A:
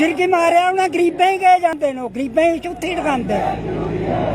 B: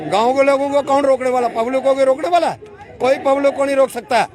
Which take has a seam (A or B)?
A